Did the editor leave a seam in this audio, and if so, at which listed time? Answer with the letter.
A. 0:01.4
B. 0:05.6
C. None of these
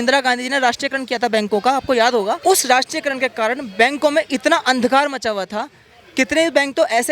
C